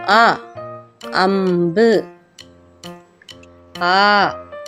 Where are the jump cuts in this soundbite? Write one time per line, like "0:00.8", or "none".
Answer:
none